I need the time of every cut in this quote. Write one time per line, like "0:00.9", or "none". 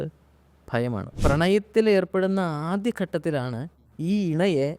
0:01.1